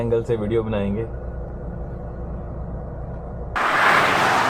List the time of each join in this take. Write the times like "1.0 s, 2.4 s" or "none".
3.6 s